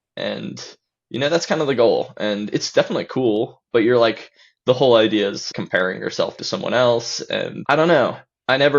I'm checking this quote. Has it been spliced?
yes; 2 cuts; at 5.5 s, 7.6 s

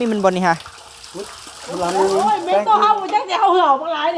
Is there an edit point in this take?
yes; 1 cut; at 2.6 s

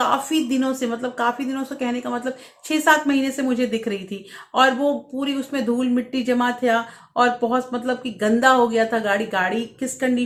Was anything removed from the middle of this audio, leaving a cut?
no; 0 cuts

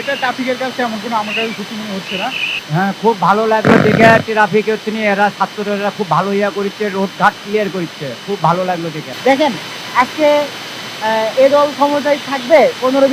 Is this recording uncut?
no; 2 cuts; at 2.5 s, 9.1 s

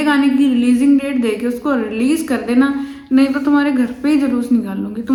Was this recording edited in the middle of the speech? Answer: no; 0 cuts

